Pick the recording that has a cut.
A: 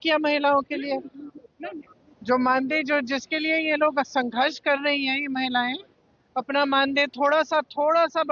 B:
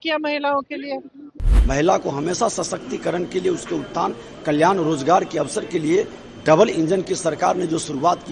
B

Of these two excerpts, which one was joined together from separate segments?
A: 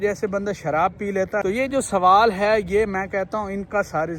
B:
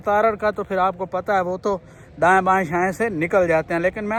A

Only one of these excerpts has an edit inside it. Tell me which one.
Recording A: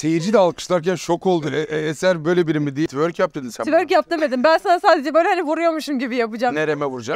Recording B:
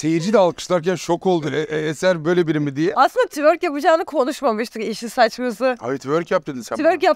A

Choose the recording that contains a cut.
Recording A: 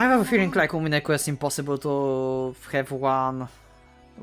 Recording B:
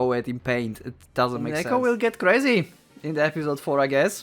B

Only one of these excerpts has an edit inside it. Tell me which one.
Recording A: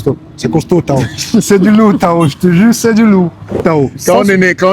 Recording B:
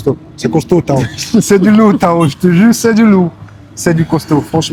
A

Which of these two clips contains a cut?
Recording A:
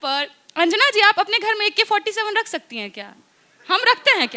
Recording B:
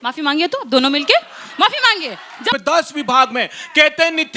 B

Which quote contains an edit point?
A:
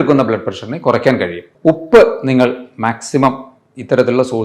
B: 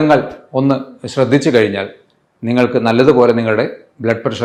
A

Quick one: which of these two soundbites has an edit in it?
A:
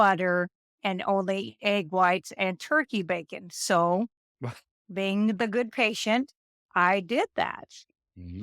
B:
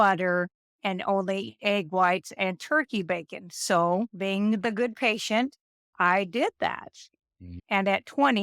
B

